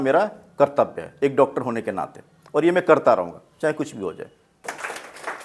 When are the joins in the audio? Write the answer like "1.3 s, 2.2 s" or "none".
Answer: 4.6 s